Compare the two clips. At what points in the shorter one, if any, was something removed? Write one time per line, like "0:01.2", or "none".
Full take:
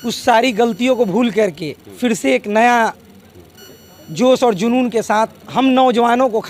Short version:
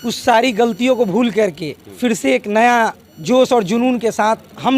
0:03.1